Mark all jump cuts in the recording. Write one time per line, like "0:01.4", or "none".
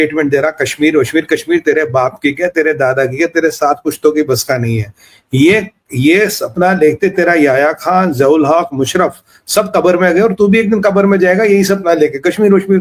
none